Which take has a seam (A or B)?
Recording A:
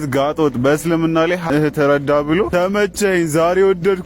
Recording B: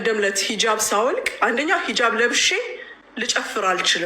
A